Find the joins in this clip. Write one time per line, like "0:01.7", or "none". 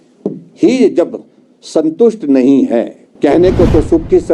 0:03.0